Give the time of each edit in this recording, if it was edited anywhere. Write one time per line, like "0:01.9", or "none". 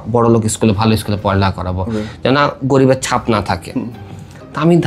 none